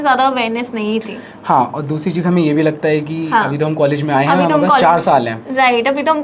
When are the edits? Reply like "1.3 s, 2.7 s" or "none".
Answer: none